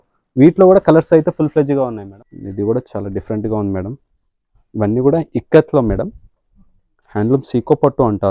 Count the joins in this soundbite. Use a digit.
1